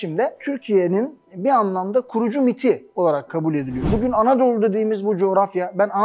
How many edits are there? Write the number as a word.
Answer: one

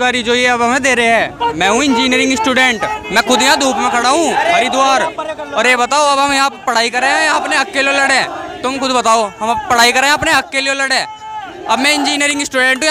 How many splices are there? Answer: zero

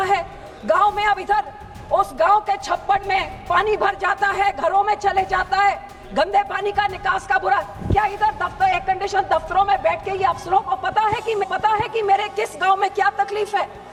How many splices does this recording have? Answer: zero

